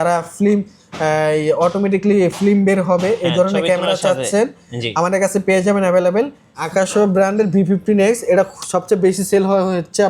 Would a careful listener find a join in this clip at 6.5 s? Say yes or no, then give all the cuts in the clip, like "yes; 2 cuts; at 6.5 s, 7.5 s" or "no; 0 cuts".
yes; 1 cut; at 6.5 s